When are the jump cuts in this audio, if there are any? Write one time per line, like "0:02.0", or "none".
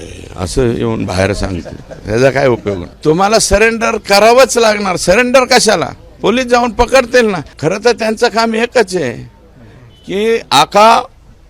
0:02.9
0:07.5

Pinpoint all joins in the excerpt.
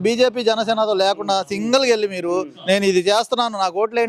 none

